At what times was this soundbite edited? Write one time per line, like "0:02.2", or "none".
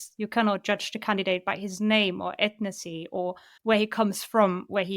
0:03.5